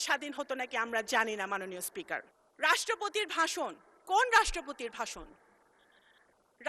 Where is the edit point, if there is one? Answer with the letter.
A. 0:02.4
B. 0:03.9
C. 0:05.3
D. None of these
A